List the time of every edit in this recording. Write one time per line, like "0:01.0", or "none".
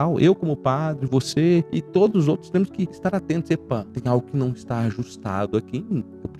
0:01.8
0:02.9
0:03.9